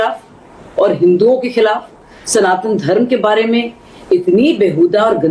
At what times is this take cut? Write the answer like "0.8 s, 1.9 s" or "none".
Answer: none